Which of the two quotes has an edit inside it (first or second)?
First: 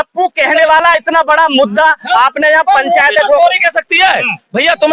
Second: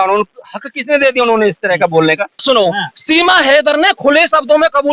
second